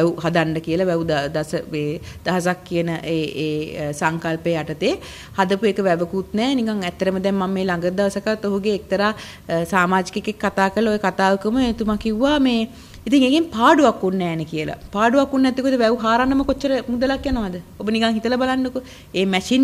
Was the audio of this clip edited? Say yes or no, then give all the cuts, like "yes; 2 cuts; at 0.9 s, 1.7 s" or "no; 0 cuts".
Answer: no; 0 cuts